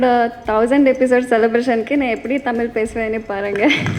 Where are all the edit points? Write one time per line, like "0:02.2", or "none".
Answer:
none